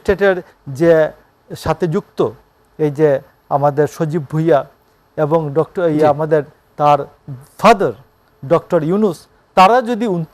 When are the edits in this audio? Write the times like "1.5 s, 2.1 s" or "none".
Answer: none